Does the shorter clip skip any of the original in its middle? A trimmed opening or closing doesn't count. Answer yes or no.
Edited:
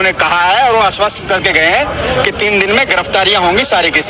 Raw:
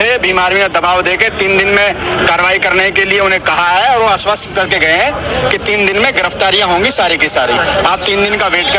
no